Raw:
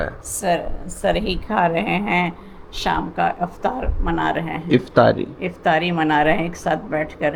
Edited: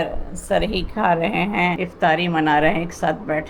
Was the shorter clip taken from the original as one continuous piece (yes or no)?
no